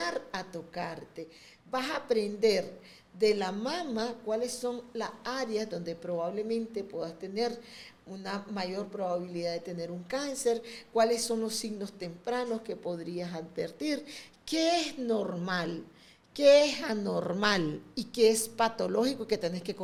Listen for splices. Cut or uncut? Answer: uncut